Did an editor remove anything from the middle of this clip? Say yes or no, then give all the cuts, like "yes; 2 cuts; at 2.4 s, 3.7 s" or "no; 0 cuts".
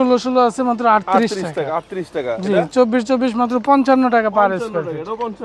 no; 0 cuts